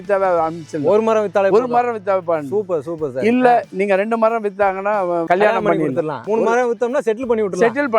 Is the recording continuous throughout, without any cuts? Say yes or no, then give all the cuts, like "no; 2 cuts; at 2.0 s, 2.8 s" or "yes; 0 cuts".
no; 2 cuts; at 5.2 s, 6.2 s